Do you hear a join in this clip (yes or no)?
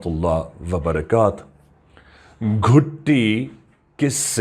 no